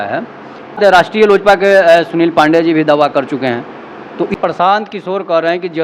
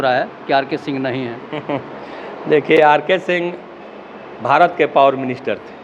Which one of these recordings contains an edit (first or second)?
first